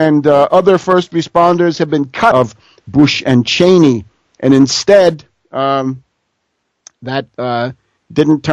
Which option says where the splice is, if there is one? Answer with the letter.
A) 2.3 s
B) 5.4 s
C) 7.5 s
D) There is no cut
D